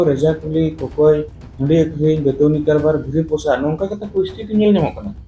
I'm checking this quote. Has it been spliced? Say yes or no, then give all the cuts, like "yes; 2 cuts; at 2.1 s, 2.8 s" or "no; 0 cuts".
no; 0 cuts